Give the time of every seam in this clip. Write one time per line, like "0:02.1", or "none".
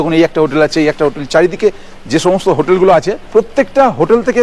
0:03.2